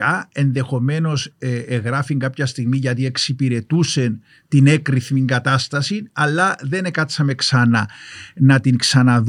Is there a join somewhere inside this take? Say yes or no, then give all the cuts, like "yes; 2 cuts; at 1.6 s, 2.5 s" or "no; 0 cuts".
no; 0 cuts